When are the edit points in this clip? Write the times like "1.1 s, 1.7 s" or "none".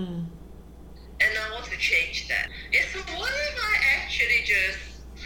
2.5 s